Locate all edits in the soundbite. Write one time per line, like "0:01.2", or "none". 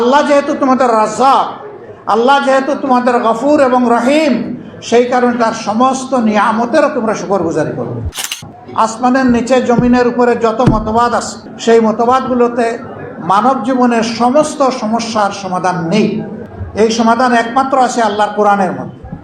0:08.3